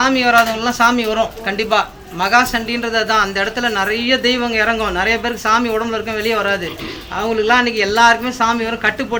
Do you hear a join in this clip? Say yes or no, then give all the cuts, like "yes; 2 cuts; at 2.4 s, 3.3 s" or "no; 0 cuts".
no; 0 cuts